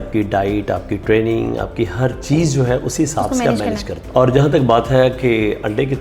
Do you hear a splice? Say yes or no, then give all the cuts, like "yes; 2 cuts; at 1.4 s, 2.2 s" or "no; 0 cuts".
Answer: yes; 1 cut; at 3.9 s